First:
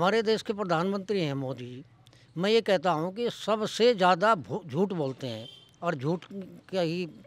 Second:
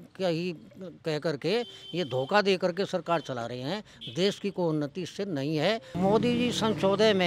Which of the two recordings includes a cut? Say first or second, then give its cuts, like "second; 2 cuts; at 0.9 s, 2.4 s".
second; 1 cut; at 5.9 s